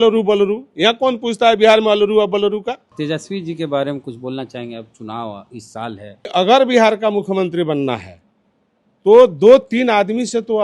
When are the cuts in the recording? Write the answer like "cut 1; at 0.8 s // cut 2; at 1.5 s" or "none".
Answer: cut 1; at 2.9 s // cut 2; at 6.3 s